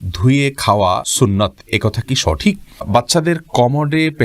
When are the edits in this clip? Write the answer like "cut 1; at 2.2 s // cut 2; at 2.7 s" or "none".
cut 1; at 1.1 s // cut 2; at 2.9 s

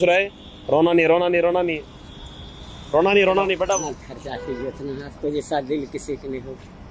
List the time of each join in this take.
none

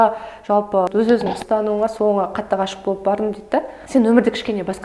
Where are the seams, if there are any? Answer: cut 1; at 0.9 s // cut 2; at 3.8 s

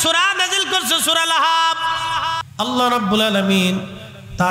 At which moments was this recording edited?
cut 1; at 2.5 s

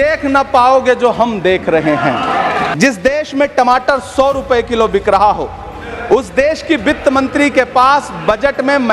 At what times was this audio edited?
cut 1; at 2.7 s

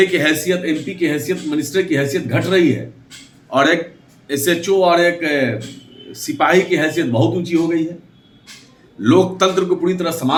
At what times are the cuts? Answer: none

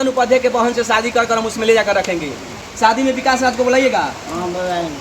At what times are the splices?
cut 1; at 2.7 s

